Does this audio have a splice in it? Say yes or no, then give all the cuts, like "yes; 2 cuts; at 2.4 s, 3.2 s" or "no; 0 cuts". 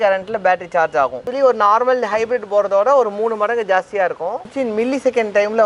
yes; 2 cuts; at 1.3 s, 4.4 s